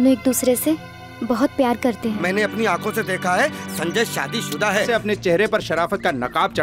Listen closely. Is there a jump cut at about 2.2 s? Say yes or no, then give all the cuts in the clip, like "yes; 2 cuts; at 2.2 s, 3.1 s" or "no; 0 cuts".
yes; 2 cuts; at 2.2 s, 4.9 s